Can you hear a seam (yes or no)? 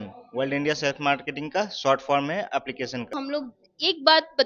yes